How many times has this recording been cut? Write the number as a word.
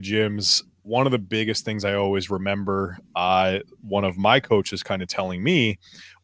zero